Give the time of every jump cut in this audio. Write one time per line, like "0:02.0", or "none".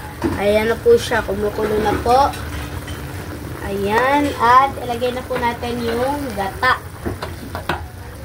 none